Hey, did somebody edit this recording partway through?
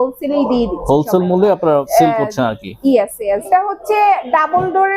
yes; 2 cuts; at 1.9 s, 3.5 s

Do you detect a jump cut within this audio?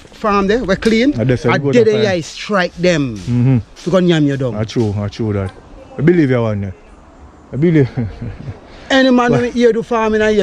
no; 0 cuts

